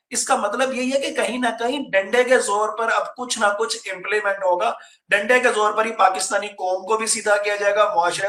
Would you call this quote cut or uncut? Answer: uncut